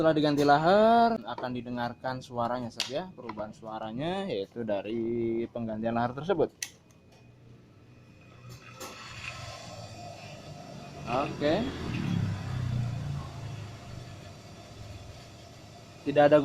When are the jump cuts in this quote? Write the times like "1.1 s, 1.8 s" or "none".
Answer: 1.2 s